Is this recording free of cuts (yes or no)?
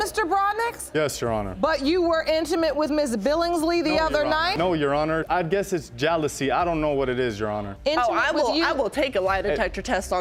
yes